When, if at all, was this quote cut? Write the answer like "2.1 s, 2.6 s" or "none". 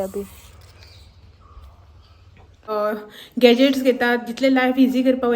2.7 s